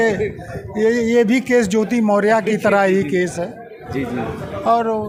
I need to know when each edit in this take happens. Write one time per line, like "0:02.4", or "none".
none